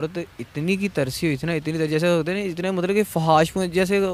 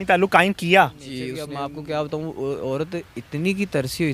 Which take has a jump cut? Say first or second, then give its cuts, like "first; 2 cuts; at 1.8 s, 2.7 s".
second; 1 cut; at 1.4 s